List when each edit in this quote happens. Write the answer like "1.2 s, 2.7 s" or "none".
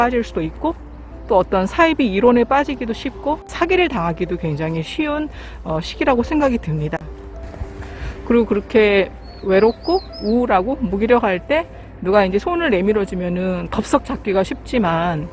3.5 s